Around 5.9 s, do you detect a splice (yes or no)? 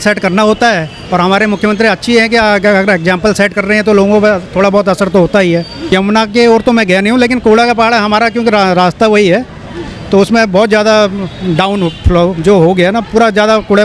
yes